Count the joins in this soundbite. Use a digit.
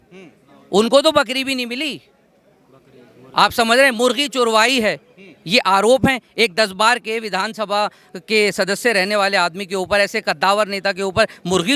0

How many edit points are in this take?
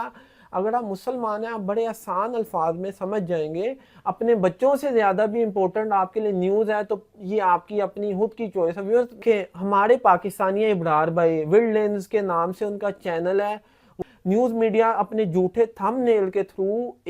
3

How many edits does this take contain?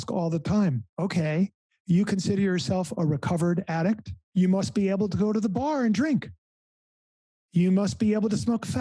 2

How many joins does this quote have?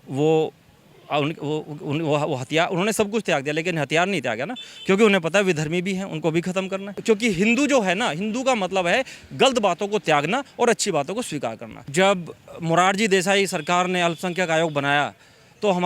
2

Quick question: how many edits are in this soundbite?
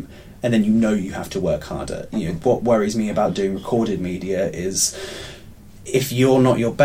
0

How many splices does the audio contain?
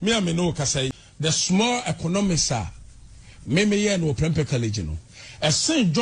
1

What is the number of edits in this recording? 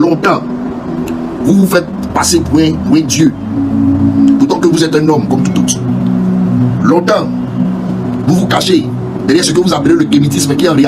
0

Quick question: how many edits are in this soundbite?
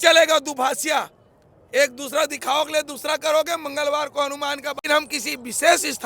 1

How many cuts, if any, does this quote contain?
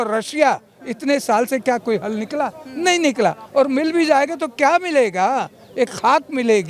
0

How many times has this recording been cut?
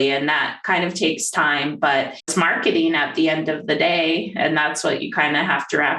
1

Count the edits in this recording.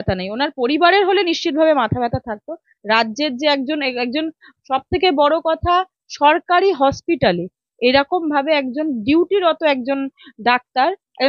0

